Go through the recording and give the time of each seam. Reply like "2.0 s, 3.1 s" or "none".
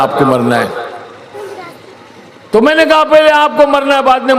1.3 s